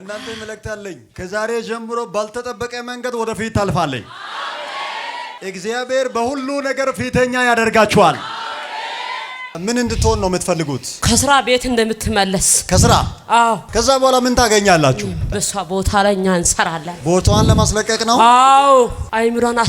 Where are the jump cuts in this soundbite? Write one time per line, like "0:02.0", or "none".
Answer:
0:01.1
0:05.4
0:09.5
0:13.6
0:15.3